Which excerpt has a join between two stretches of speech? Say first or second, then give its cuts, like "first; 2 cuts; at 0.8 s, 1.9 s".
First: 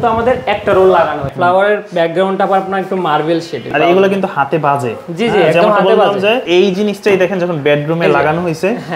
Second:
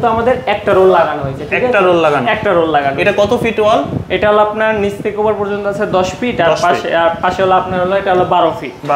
first; 3 cuts; at 1.3 s, 3.7 s, 6.4 s